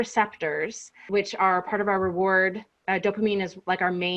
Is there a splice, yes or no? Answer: yes